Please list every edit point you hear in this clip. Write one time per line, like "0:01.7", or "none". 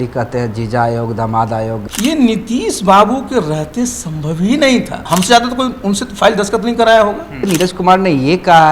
0:01.9
0:05.0
0:07.4